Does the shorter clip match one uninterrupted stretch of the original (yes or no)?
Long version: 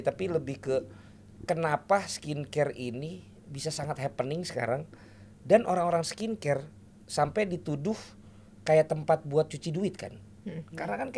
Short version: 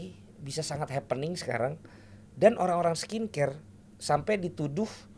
yes